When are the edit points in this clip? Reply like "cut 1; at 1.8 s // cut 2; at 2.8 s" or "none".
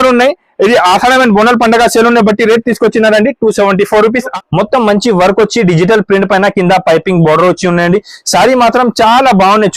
cut 1; at 4.3 s